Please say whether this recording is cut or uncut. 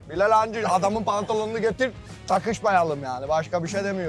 uncut